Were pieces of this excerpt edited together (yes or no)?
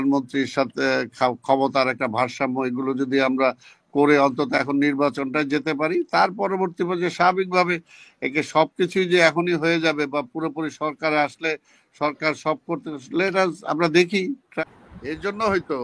yes